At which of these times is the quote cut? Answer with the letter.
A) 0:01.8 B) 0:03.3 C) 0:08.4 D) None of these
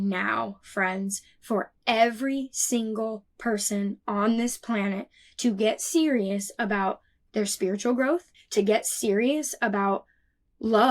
C